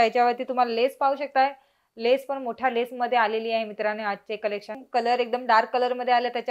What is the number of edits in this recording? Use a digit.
1